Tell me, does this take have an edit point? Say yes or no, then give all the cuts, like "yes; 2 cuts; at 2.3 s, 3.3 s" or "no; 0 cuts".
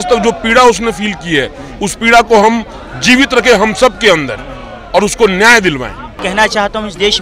yes; 1 cut; at 6.2 s